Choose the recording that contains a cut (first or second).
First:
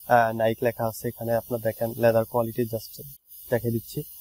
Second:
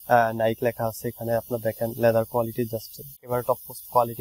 second